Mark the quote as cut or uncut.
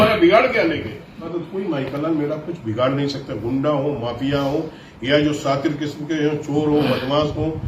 cut